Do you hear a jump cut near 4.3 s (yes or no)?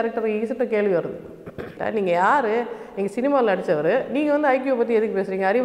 no